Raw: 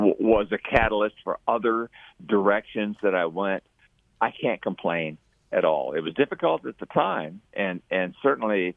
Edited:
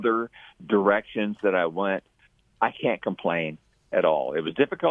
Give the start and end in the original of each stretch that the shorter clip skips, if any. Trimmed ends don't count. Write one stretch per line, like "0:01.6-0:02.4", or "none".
none